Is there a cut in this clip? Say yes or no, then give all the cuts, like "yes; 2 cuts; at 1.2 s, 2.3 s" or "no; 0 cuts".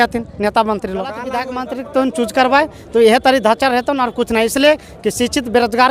yes; 1 cut; at 1.3 s